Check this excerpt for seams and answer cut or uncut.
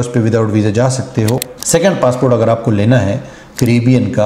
cut